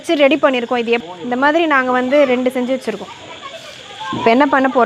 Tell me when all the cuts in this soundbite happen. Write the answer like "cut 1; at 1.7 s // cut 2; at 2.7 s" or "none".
cut 1; at 1.0 s

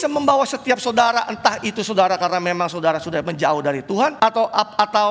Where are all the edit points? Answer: cut 1; at 4.1 s

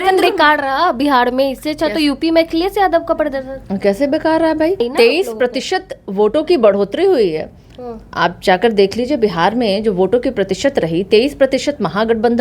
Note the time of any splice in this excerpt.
cut 1; at 4.9 s

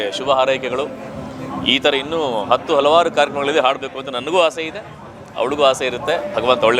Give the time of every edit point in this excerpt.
none

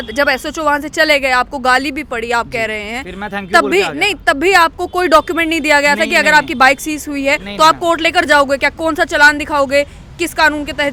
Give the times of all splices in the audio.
none

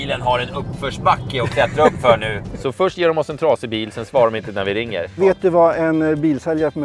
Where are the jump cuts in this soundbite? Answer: cut 1; at 2.5 s // cut 2; at 5.1 s

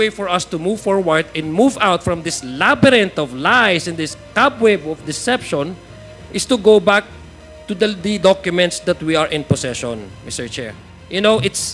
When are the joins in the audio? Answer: cut 1; at 10.8 s

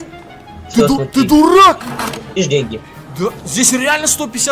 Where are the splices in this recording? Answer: cut 1; at 2.3 s

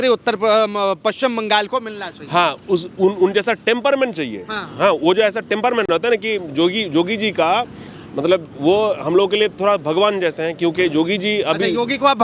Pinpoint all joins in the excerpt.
none

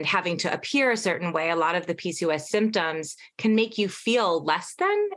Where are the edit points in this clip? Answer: none

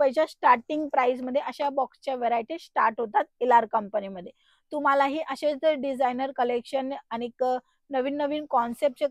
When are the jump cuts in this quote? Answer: none

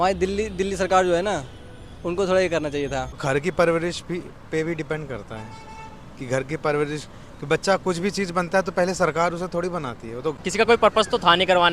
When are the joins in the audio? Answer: cut 1; at 3.2 s // cut 2; at 10.4 s

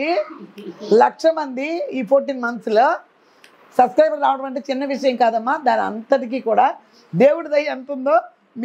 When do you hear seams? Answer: none

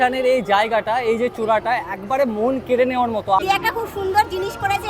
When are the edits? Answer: cut 1; at 3.4 s

